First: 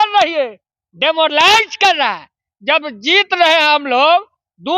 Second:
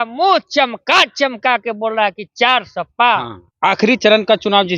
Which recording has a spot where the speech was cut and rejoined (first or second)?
second